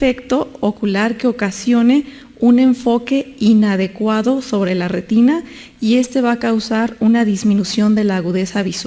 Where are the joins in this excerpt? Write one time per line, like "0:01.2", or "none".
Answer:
0:04.2